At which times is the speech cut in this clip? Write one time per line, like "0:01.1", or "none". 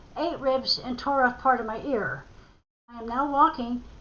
0:02.9

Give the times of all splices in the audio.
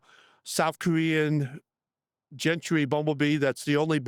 none

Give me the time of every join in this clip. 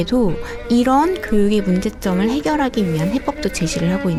none

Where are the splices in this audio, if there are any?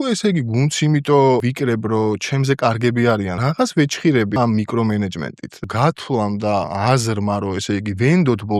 0:01.4
0:03.4
0:04.4
0:05.6
0:06.7

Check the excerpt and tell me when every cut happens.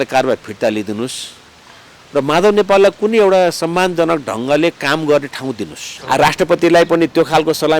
0:05.9

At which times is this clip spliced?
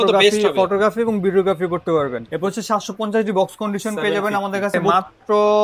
0:02.2
0:04.8

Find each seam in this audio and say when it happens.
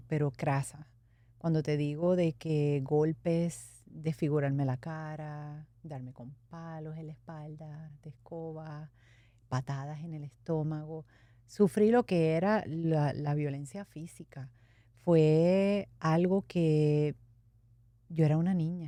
none

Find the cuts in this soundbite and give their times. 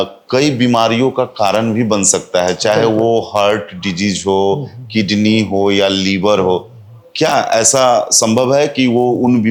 none

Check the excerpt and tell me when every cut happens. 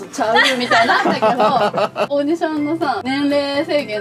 0:02.1
0:03.0

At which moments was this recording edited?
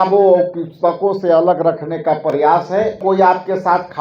0:03.0

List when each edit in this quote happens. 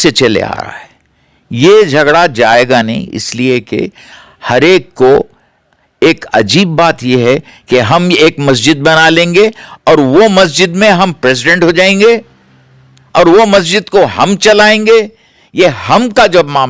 0:07.5

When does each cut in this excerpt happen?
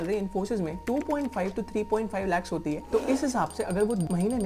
none

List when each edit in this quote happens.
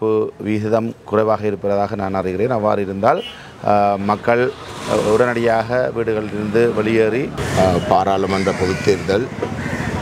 0:07.4

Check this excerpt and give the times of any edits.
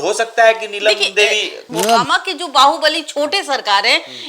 0:01.6

